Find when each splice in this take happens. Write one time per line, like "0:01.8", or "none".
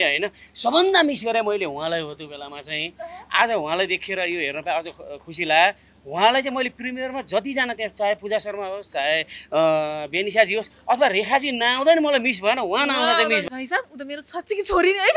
0:13.4